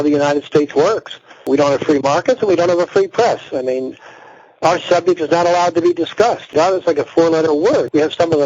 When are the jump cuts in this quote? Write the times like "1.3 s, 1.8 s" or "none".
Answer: 1.4 s